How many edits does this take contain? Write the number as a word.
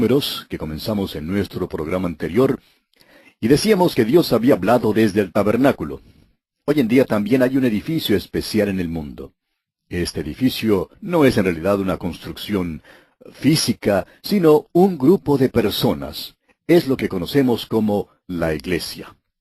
one